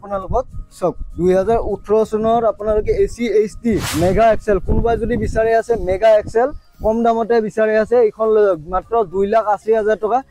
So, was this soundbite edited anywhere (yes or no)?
yes